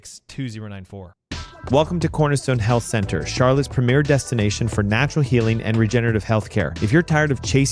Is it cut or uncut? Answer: cut